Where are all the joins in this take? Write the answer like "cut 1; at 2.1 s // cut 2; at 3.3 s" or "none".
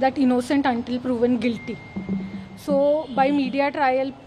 none